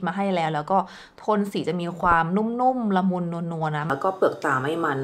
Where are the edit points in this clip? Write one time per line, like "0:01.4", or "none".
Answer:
0:03.9